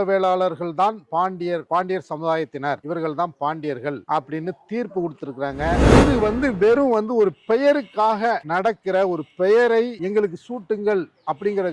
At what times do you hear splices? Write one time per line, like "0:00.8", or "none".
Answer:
0:05.9